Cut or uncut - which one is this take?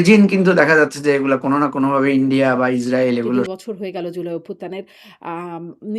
cut